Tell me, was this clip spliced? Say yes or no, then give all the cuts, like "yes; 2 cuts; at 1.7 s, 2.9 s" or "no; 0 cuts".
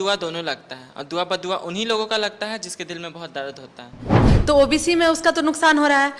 yes; 1 cut; at 4.3 s